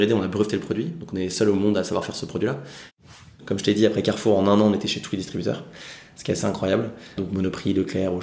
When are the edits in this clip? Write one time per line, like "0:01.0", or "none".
0:03.0